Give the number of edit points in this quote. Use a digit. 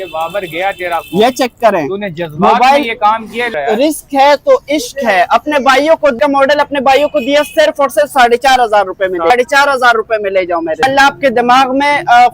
4